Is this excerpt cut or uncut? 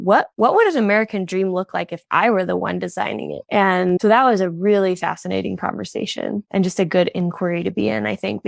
uncut